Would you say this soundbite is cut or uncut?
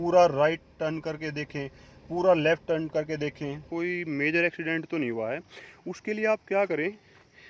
cut